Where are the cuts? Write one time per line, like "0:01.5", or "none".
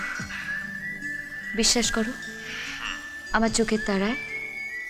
none